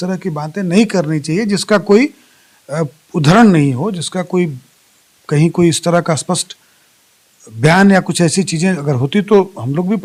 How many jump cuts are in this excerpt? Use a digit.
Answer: 0